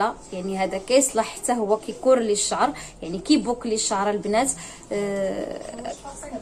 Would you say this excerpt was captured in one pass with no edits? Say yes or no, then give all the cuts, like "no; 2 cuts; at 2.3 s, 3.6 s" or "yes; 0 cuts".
yes; 0 cuts